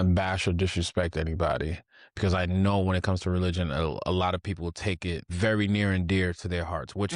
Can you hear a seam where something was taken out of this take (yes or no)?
yes